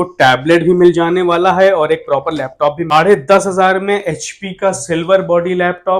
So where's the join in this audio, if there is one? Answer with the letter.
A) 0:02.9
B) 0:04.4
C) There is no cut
A